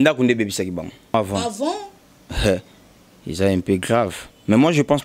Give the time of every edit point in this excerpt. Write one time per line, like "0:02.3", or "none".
0:01.1